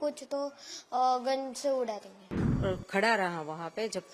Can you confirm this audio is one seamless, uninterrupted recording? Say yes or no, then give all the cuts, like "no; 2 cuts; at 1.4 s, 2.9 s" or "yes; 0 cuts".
no; 1 cut; at 2.4 s